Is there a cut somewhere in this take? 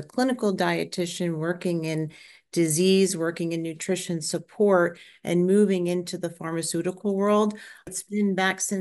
yes; 1 cut; at 7.9 s

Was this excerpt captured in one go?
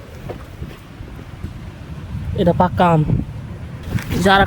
yes; 0 cuts

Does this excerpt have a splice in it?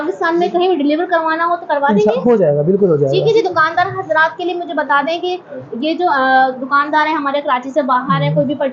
no; 0 cuts

